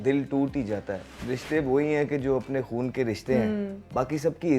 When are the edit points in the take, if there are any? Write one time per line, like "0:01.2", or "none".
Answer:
0:01.1